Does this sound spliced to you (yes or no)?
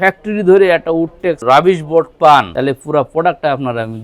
yes